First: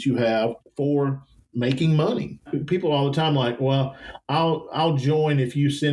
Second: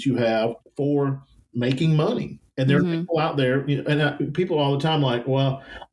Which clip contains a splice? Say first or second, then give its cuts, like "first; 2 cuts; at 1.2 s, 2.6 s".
first; 1 cut; at 2.5 s